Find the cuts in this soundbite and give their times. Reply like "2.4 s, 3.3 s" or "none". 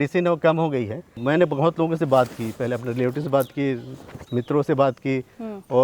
1.2 s